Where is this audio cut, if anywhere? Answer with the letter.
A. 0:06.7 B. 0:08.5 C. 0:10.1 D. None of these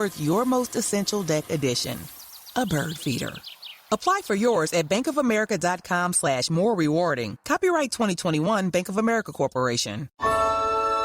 C